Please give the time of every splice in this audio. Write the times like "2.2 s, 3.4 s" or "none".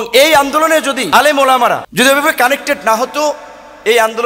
1.0 s, 1.9 s